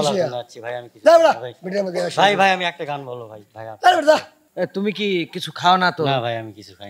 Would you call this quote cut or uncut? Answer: cut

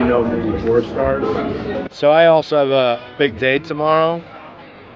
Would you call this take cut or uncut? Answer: cut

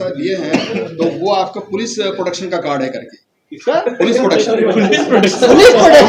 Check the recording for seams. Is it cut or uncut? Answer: uncut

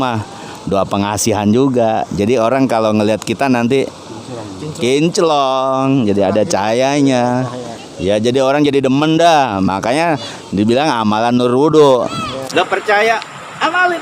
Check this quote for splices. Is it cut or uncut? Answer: cut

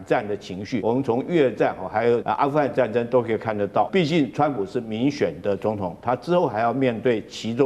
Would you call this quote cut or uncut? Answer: cut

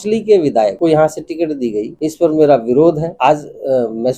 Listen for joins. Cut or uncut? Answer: cut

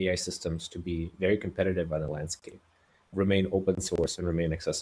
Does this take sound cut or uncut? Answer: cut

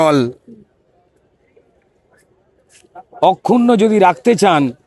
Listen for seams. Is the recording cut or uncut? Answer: uncut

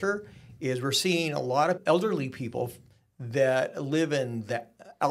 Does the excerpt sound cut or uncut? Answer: cut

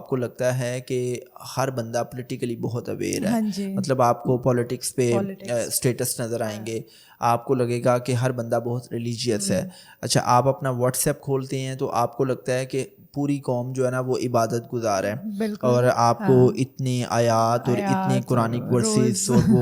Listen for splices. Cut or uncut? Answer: uncut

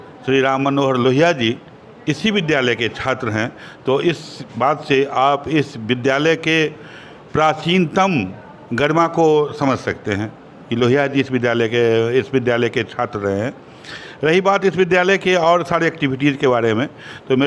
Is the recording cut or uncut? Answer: uncut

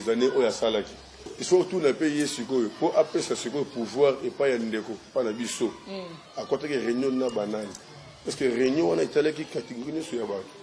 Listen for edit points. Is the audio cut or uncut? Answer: cut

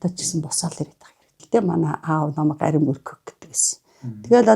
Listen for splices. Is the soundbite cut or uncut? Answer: cut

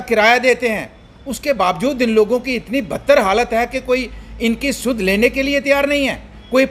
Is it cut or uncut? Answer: uncut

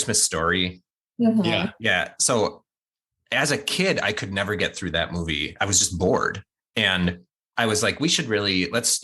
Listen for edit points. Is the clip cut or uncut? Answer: uncut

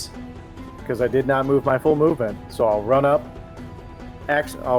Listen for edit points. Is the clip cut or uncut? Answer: uncut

